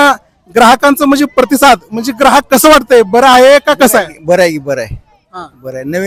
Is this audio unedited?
yes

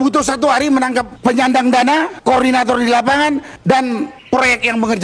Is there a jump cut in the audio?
yes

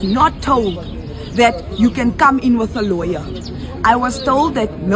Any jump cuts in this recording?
no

